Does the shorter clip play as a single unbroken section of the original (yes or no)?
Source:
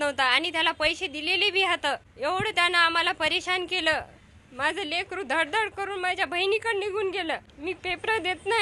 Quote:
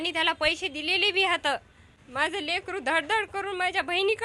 no